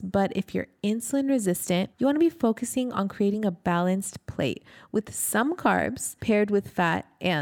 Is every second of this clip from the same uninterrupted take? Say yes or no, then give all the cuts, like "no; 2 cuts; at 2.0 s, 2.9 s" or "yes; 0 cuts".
no; 2 cuts; at 1.9 s, 6.1 s